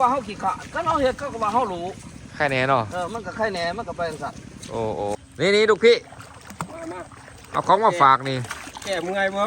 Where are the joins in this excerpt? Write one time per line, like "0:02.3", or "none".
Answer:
0:05.2